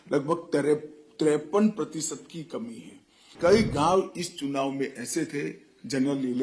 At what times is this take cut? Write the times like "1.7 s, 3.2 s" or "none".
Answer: 3.3 s